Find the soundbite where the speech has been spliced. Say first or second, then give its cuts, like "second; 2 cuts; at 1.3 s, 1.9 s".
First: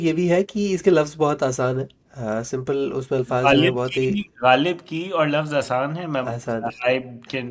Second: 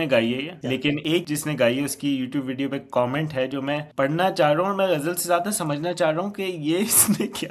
second; 2 cuts; at 1.1 s, 3.9 s